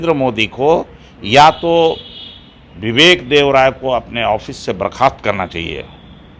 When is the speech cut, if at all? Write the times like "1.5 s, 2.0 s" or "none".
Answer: none